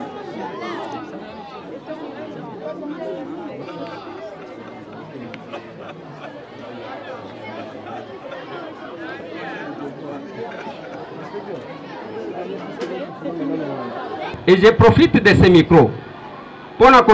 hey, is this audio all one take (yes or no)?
no